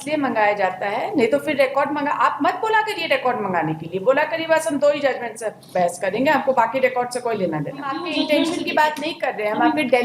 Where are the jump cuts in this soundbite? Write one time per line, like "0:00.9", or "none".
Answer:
0:08.0